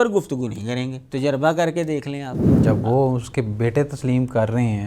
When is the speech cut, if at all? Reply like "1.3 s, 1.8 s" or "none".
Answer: 1.0 s, 2.4 s

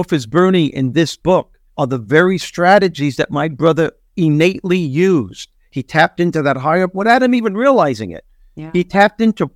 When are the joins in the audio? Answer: 1.6 s

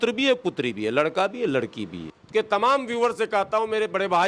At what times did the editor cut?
2.1 s

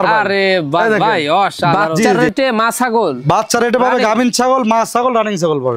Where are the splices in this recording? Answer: 2.2 s

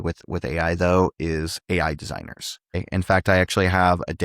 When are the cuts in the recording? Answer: 2.5 s

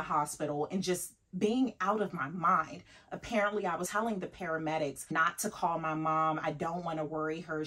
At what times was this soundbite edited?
3.9 s, 5.1 s

